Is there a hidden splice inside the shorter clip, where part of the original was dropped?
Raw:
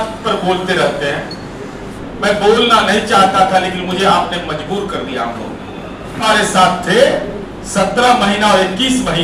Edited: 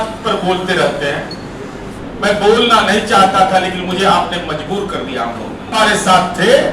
yes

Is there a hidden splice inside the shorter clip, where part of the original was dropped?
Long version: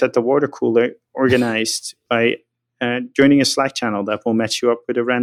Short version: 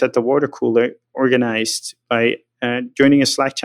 yes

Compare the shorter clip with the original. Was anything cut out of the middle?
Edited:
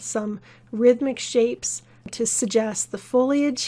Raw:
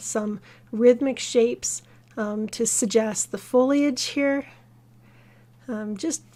yes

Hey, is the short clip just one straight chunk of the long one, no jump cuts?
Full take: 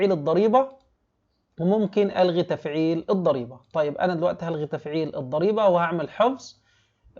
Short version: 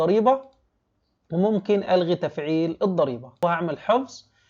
no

